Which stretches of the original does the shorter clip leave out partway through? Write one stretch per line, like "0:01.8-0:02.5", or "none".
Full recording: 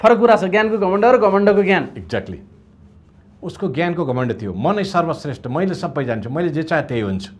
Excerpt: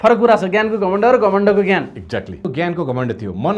0:02.4-0:03.6